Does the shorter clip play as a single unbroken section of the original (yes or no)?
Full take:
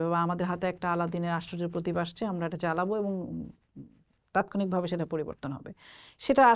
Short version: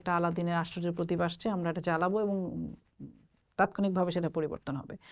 yes